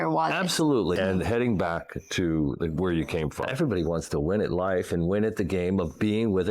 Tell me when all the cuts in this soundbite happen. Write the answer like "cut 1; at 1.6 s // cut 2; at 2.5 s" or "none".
cut 1; at 1.0 s // cut 2; at 3.5 s

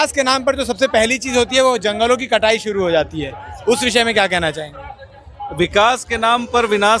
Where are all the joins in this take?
none

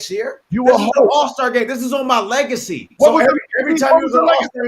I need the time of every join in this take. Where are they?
none

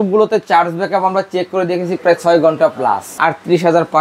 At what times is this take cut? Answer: cut 1; at 3.1 s

